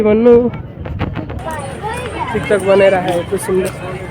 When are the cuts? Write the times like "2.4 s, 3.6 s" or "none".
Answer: 1.4 s